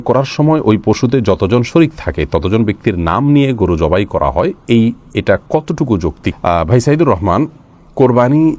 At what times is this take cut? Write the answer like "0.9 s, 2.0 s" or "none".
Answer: none